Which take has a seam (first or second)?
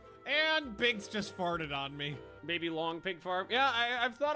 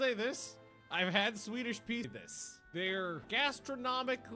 second